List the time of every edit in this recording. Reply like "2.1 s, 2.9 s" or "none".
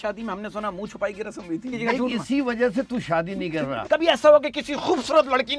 1.7 s, 3.8 s